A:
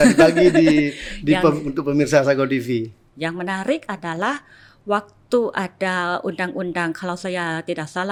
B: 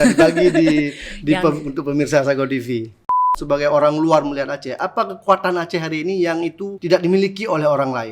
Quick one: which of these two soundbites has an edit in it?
B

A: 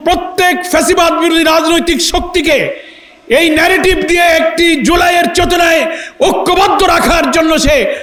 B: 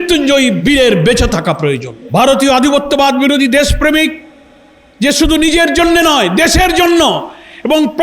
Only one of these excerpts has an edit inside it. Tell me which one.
B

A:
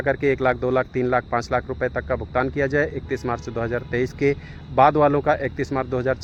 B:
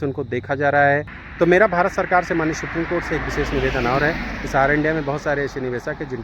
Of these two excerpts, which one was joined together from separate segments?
B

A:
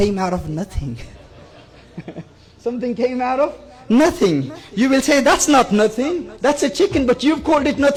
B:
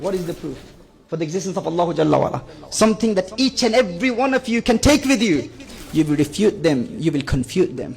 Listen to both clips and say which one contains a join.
B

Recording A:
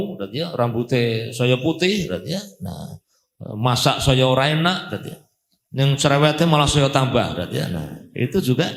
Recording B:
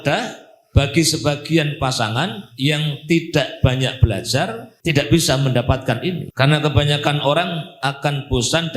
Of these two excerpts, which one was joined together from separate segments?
B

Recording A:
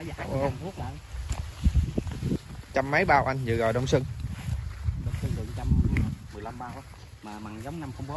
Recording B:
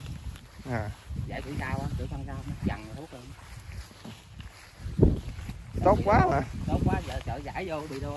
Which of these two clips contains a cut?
A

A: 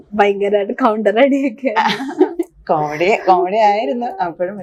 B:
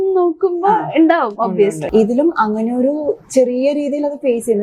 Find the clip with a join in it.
B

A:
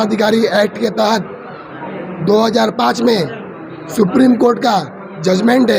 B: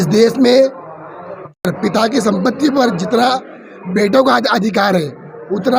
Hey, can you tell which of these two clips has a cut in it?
B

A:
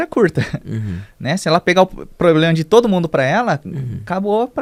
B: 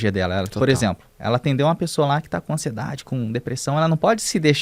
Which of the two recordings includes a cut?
B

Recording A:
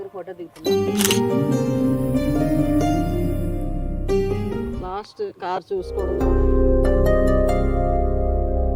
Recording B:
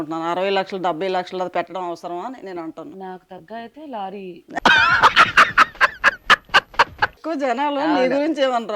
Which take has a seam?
B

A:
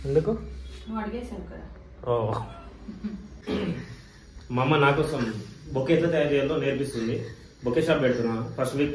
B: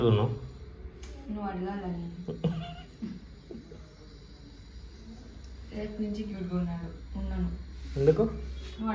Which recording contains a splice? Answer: A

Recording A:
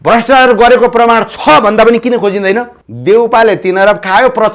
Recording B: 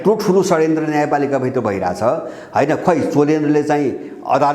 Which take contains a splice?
A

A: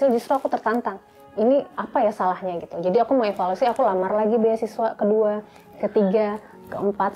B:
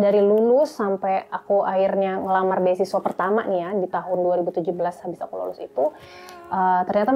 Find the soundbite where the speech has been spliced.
A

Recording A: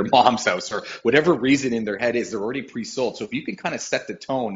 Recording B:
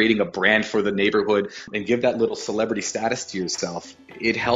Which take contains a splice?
B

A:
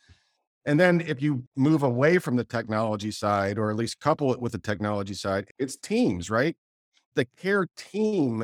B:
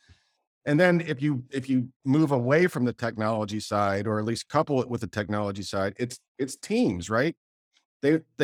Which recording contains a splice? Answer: A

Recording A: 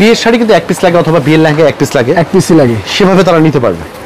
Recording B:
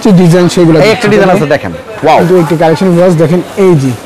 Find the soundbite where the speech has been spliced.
B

